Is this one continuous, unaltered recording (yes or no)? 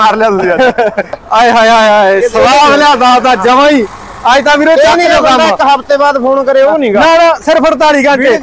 no